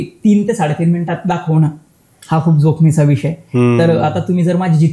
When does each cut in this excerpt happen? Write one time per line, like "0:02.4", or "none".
none